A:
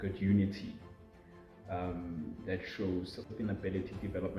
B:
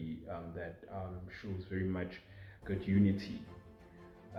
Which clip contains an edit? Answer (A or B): A